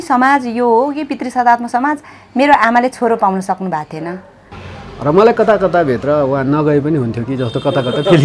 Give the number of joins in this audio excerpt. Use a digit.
1